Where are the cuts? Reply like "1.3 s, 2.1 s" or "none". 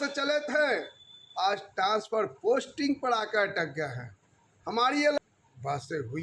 5.2 s